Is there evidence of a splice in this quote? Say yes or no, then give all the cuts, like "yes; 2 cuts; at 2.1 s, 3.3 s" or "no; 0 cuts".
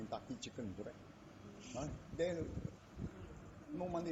no; 0 cuts